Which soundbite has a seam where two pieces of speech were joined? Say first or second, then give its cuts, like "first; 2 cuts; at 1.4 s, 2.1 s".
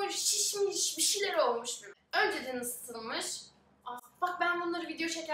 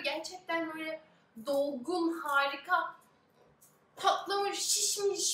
first; 1 cut; at 2.0 s